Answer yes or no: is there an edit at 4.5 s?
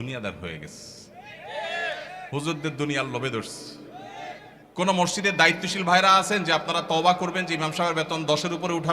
yes